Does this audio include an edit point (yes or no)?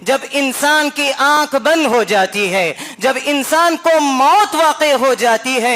yes